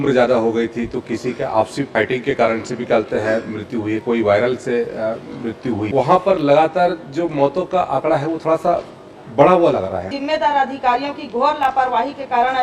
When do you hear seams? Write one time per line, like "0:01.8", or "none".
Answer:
0:01.9
0:05.8
0:10.1

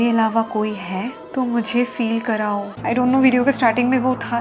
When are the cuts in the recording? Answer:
0:02.7

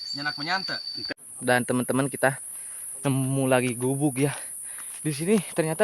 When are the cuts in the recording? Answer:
0:01.3

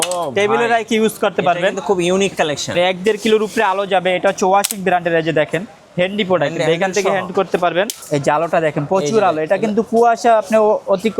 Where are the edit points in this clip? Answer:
0:02.7

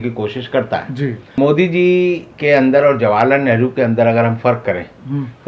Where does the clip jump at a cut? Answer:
0:01.4

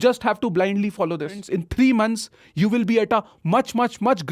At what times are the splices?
0:01.4
0:03.1

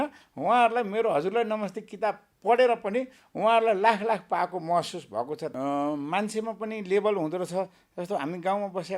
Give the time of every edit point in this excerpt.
0:05.5

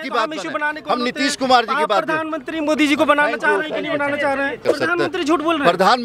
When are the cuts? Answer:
0:04.6

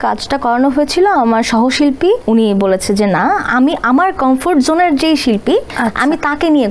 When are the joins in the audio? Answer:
0:02.2
0:05.7

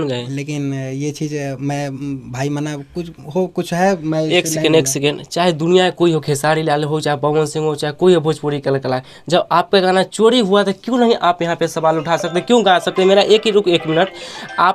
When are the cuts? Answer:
none

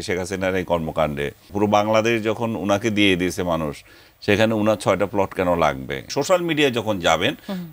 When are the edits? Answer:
0:01.5
0:06.1

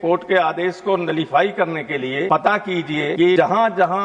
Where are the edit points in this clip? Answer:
0:02.3
0:03.2

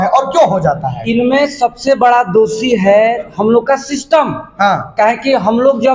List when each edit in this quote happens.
none

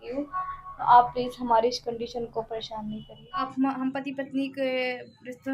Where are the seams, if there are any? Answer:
0:03.5

